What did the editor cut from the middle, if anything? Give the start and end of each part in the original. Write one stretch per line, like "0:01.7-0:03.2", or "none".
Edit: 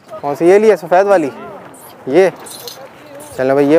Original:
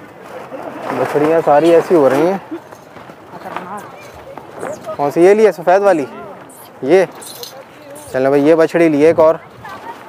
none